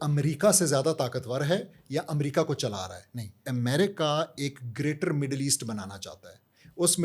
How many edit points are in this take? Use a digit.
1